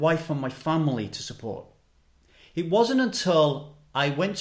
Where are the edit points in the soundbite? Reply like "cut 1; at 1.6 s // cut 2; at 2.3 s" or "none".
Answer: none